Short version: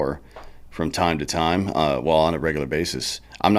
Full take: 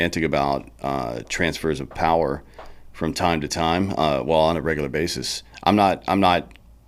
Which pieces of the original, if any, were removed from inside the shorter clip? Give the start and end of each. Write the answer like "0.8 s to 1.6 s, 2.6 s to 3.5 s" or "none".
none